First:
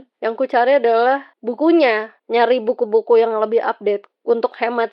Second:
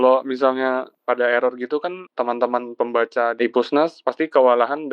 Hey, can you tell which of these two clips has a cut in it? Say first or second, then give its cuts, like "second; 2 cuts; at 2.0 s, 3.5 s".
second; 3 cuts; at 0.9 s, 2.0 s, 3.8 s